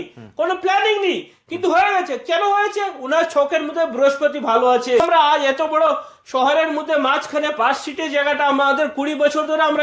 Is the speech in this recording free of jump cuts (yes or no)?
no